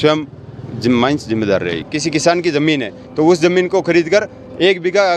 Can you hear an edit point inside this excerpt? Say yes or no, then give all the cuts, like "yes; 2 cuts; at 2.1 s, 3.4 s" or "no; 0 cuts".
yes; 1 cut; at 1.9 s